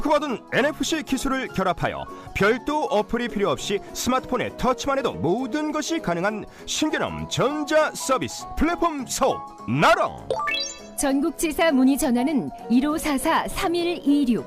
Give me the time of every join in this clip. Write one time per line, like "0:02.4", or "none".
none

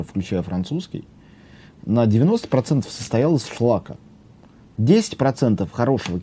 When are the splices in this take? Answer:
none

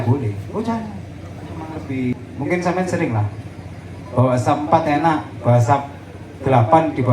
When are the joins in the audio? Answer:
0:01.8

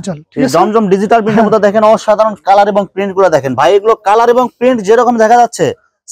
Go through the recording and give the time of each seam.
none

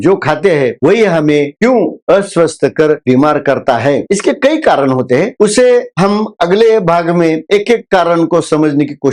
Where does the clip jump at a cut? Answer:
none

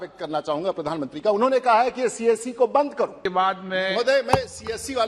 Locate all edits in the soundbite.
0:03.2

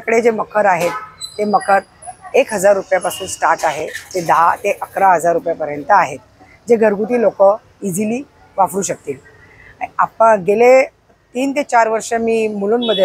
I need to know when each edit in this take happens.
none

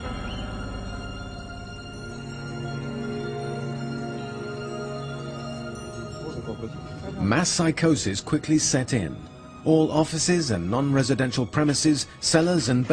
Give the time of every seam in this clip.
0:07.7

